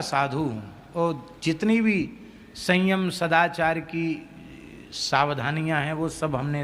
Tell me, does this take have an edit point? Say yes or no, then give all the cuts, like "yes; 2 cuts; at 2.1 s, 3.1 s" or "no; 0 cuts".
no; 0 cuts